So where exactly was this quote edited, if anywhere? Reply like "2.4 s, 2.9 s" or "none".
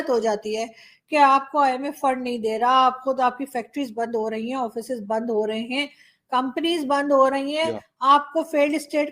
none